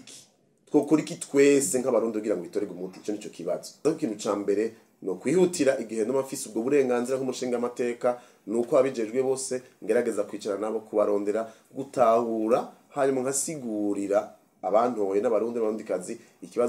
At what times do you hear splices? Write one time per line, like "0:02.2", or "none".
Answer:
0:03.8